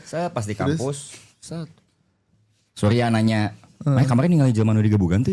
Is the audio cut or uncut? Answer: uncut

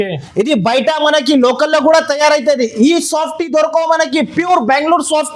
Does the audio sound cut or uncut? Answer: uncut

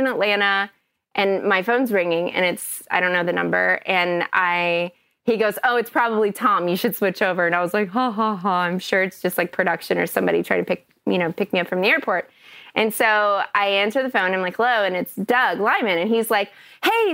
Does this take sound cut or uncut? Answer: uncut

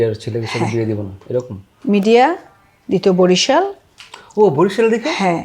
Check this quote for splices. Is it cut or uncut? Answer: uncut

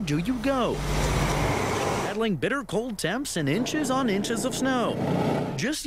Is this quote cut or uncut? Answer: cut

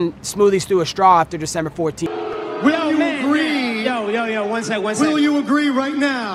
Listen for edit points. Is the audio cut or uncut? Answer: uncut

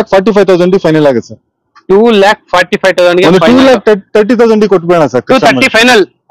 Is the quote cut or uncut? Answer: uncut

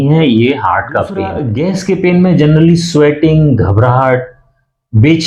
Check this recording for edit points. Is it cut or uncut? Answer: cut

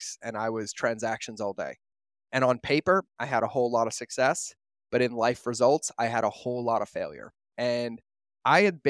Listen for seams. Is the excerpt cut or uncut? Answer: uncut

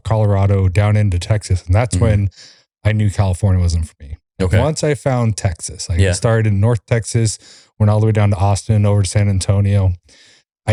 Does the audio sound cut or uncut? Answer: uncut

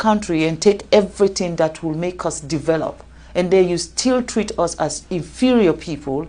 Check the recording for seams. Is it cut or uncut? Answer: uncut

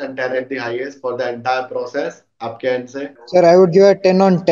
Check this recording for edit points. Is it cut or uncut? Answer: cut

